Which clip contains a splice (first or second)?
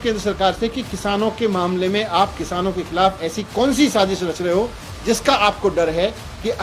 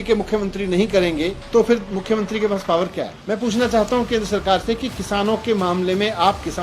second